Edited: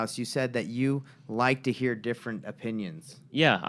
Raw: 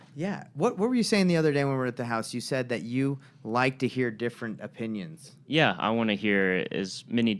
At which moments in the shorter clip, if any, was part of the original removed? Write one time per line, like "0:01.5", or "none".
none